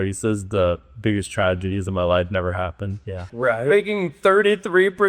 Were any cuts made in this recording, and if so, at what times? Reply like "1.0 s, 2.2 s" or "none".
3.2 s